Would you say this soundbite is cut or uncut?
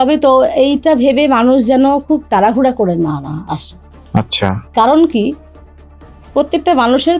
uncut